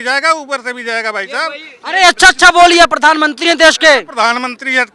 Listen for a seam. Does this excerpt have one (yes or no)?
no